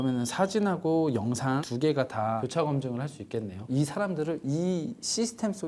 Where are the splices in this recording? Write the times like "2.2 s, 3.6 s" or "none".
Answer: 3.6 s